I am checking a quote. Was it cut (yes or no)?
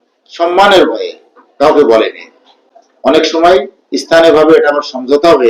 no